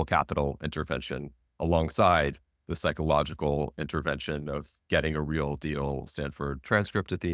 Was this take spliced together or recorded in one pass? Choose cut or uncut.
uncut